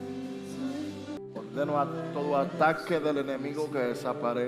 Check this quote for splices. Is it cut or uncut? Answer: cut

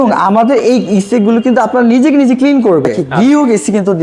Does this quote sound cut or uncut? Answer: cut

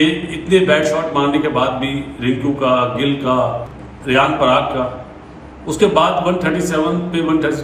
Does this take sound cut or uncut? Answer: uncut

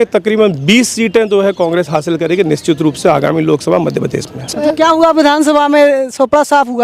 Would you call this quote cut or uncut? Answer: cut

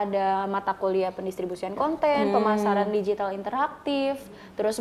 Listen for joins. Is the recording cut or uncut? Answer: uncut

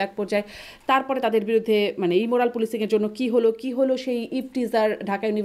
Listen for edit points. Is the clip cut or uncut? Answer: uncut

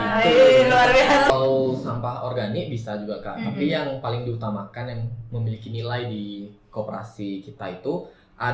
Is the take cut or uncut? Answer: cut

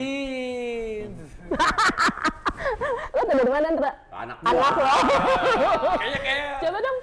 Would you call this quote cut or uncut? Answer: uncut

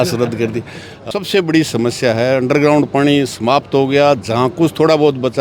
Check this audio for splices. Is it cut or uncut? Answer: cut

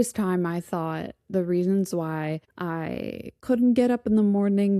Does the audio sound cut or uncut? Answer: uncut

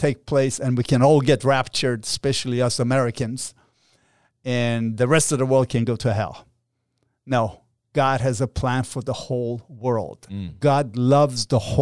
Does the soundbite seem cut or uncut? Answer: uncut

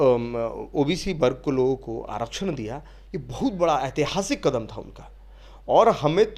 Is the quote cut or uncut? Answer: uncut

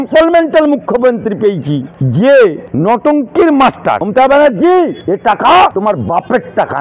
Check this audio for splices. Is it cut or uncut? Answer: cut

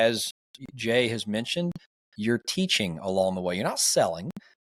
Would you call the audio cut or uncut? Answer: uncut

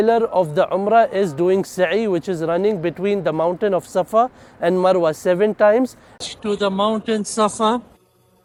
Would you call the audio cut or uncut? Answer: uncut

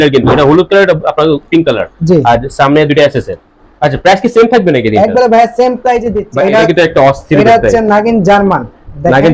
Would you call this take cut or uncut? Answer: cut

